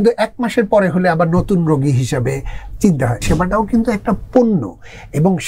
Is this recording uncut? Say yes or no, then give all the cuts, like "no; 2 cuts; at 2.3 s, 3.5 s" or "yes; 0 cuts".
no; 1 cut; at 3.2 s